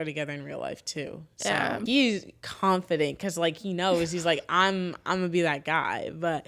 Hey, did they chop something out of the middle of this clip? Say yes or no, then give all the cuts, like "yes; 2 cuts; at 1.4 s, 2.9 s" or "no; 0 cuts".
yes; 1 cut; at 1.8 s